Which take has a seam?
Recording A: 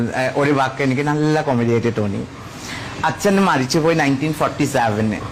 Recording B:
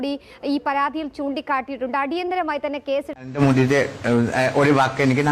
B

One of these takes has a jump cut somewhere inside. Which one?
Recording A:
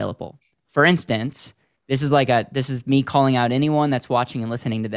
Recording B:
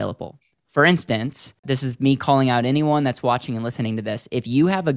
B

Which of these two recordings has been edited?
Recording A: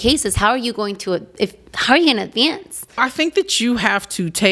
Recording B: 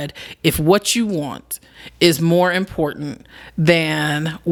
A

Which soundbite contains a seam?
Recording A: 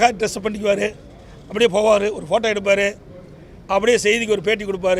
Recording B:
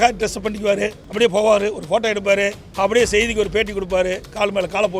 B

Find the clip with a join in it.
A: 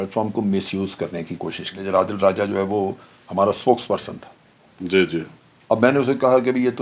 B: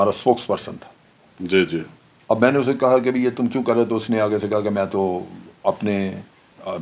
A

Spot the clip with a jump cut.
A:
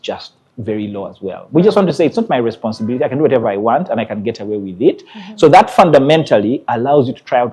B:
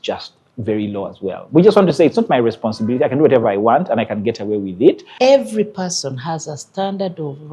B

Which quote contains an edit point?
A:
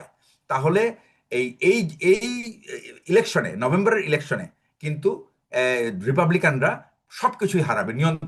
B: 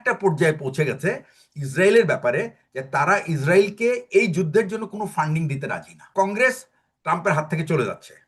B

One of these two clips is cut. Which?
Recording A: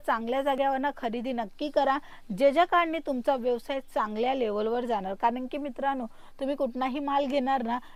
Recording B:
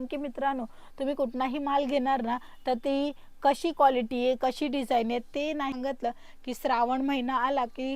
B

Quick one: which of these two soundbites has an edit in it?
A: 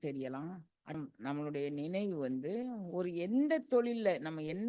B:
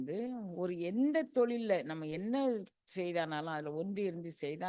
A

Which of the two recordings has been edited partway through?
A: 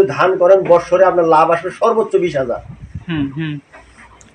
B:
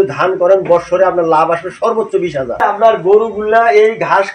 B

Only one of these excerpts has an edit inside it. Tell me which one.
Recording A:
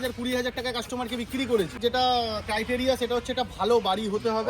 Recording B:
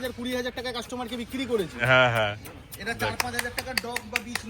A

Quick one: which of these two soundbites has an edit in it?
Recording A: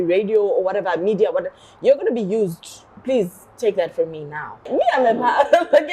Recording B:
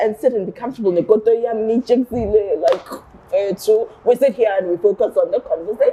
A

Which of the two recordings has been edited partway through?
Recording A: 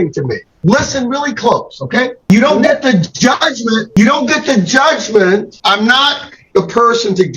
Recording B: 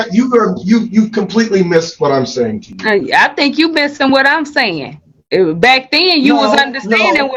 A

